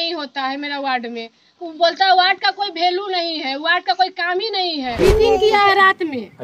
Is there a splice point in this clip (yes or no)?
yes